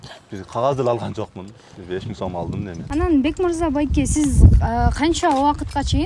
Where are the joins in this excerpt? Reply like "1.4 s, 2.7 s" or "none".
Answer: 2.8 s